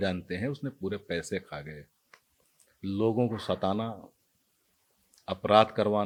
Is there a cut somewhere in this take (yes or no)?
no